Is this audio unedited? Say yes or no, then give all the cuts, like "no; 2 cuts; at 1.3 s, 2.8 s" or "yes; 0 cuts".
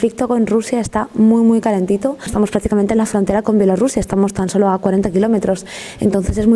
yes; 0 cuts